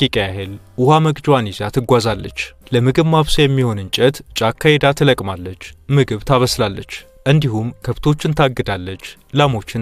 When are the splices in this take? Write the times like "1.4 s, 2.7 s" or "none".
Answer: none